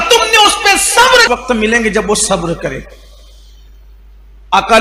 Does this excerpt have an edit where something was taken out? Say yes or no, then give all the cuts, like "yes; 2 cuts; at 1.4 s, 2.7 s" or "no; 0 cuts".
yes; 1 cut; at 1.3 s